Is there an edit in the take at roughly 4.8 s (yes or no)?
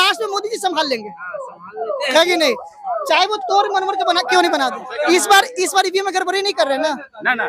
yes